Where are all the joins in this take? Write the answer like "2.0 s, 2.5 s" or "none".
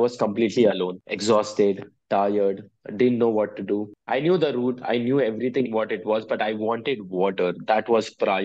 1.1 s, 4.0 s